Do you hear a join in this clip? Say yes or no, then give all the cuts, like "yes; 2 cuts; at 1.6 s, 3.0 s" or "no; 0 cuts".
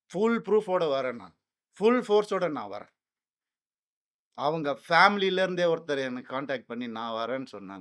no; 0 cuts